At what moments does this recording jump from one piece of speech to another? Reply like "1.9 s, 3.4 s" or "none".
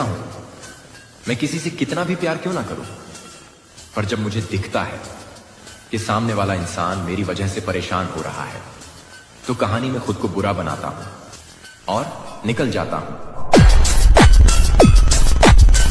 none